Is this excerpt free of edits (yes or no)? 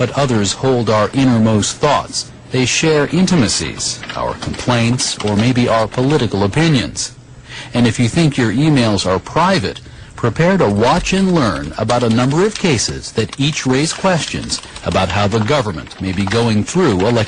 yes